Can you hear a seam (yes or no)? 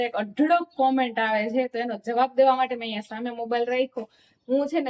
no